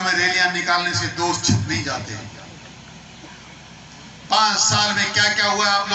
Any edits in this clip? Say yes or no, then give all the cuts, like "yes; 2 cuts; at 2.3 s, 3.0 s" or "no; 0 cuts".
no; 0 cuts